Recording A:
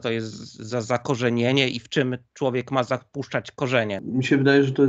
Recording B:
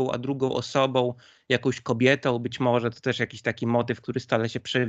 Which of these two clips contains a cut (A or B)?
A